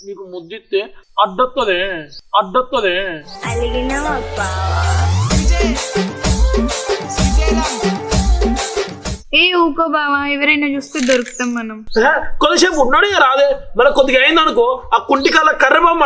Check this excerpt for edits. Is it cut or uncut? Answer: uncut